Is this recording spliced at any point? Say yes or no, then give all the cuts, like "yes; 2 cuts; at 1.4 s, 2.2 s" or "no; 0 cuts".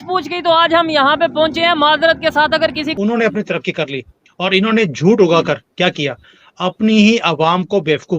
yes; 1 cut; at 2.9 s